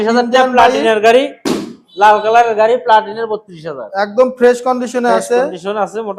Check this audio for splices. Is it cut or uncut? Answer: uncut